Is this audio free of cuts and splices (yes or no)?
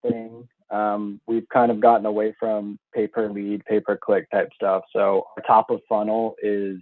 yes